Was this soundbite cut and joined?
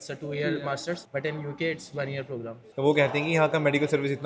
yes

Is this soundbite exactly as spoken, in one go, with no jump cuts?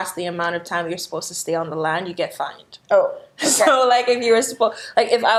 yes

